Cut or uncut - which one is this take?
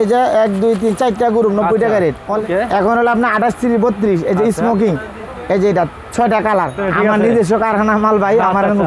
cut